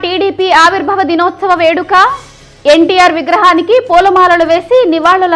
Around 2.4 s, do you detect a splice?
no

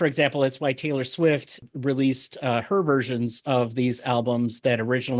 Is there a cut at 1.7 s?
yes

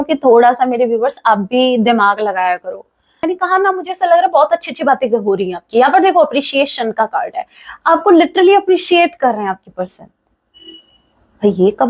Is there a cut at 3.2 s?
yes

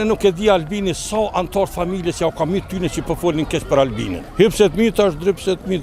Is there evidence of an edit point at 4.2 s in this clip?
yes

